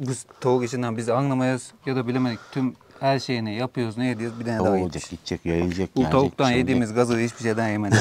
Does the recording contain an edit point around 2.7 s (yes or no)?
no